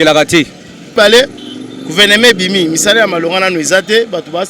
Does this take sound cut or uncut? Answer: cut